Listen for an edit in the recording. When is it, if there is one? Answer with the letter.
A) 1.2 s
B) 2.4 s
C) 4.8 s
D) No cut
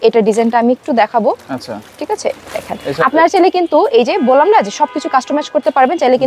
D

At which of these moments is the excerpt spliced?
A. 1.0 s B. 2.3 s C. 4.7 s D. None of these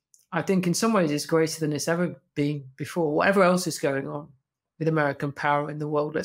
D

